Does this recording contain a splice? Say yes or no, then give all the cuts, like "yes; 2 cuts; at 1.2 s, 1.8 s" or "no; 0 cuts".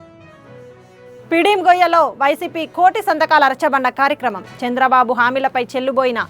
no; 0 cuts